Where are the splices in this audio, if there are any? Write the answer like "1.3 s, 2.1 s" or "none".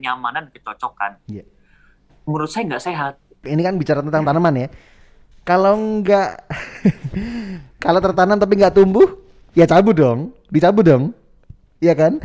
3.3 s

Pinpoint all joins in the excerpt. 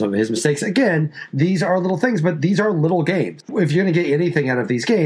3.5 s

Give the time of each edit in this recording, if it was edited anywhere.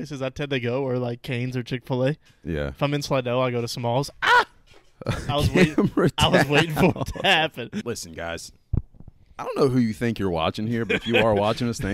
7.8 s

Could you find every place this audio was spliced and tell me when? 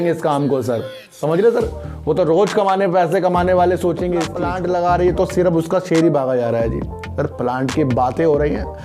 4.4 s

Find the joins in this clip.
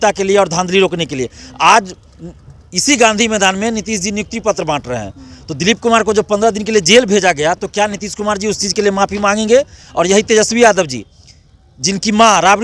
none

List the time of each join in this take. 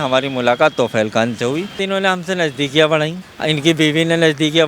1.8 s

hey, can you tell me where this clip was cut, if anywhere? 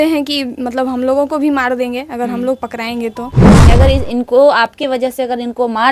3.6 s

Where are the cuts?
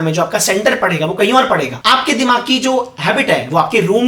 1.7 s

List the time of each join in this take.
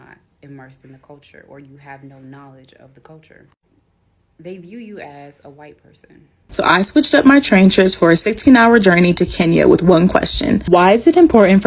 6.5 s

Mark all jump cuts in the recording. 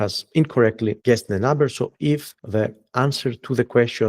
1.0 s, 2.4 s

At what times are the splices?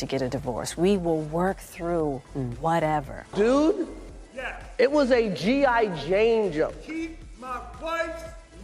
3.2 s

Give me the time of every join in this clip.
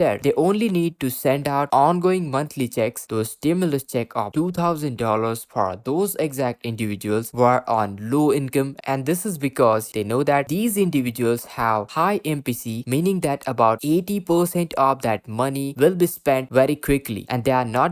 8.8 s, 9.9 s

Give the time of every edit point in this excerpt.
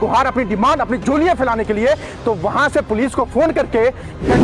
none

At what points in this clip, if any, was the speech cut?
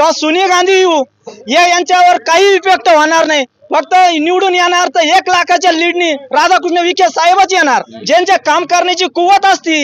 7.9 s

